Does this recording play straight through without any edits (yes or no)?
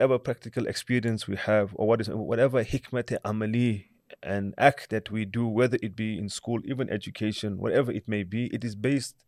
yes